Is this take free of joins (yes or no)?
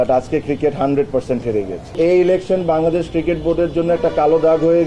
no